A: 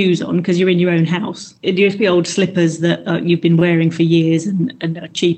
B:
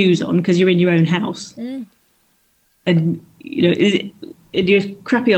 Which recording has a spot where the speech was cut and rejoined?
A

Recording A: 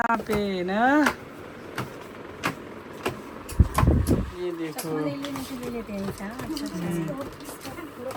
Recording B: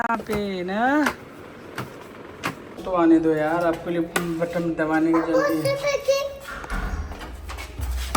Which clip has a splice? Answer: B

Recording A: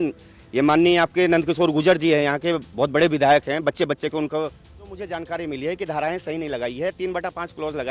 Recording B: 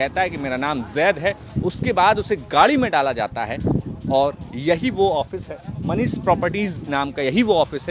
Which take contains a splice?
A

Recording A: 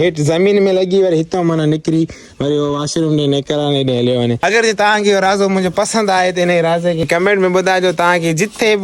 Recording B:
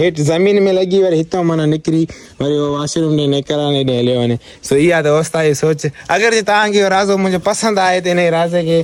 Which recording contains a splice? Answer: A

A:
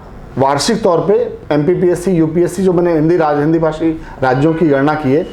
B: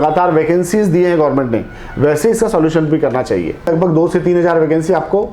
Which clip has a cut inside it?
B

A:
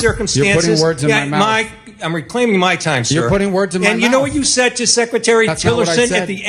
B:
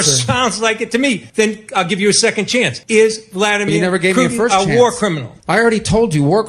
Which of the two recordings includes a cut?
B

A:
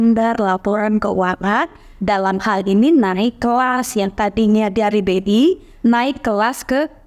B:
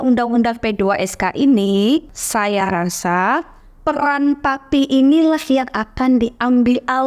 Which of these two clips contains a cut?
B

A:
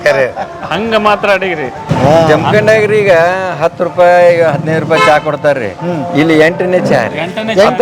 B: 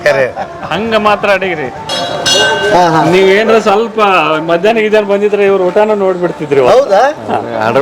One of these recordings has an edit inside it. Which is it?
A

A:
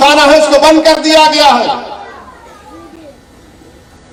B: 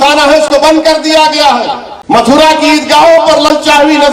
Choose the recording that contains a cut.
B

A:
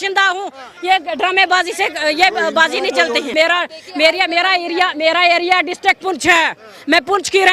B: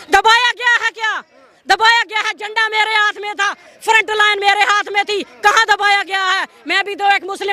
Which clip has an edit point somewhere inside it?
A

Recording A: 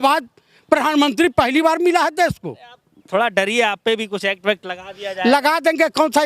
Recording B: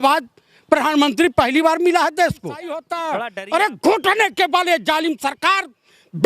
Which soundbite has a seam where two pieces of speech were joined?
B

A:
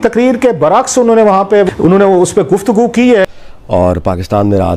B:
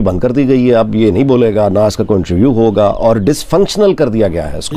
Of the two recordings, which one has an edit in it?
A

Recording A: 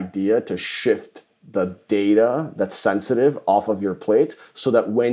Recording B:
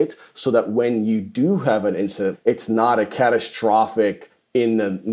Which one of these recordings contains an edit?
B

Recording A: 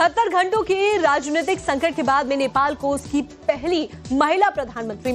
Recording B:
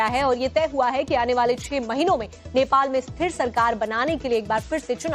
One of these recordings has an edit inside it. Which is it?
A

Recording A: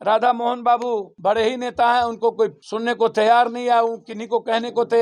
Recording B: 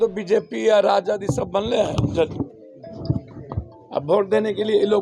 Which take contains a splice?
A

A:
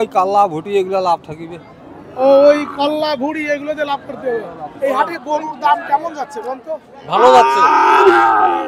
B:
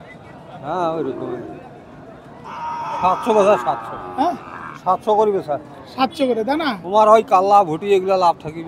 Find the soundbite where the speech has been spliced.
A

